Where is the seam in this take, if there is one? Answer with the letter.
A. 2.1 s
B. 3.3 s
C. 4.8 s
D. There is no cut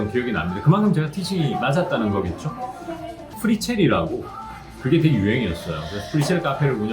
B